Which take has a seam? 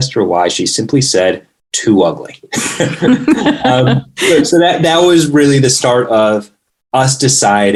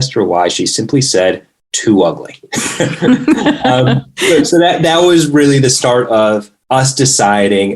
second; 1 cut; at 6.5 s

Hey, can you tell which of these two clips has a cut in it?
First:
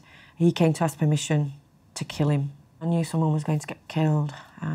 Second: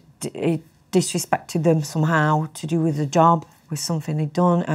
first; 1 cut; at 2.9 s

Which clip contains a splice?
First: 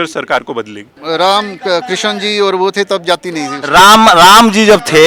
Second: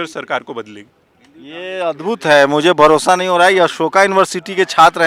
first; 1 cut; at 0.9 s

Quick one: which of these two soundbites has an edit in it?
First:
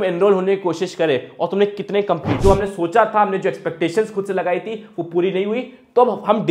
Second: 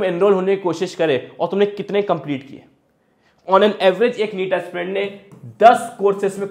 first; 1 cut; at 2.4 s

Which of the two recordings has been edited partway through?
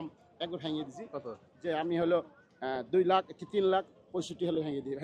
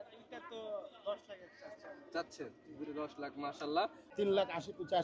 second; 1 cut; at 4.0 s

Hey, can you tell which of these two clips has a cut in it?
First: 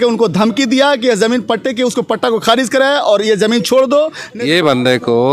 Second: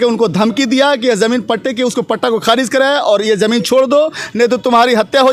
first; 1 cut; at 4.2 s

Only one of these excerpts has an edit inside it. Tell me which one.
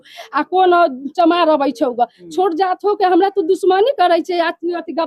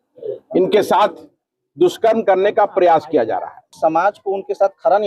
second; 1 cut; at 3.7 s

